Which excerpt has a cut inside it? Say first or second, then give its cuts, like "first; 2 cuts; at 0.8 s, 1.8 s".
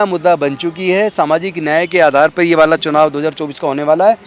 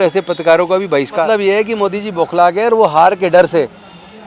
second; 1 cut; at 1.2 s